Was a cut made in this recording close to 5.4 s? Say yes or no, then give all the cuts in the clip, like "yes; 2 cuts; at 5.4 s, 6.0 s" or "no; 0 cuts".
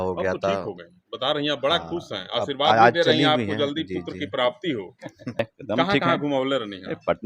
yes; 1 cut; at 5.4 s